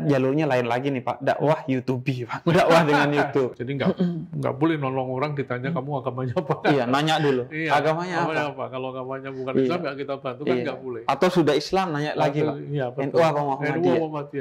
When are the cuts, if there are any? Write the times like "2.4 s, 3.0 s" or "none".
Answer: 3.6 s